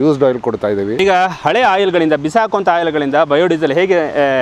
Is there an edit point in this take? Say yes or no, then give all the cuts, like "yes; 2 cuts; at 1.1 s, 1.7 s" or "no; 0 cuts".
yes; 1 cut; at 0.9 s